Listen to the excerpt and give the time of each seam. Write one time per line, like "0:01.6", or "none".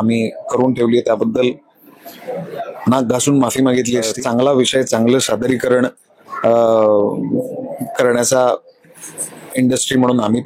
0:04.2